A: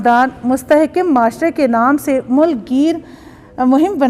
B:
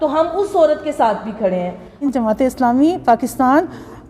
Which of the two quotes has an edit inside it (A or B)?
B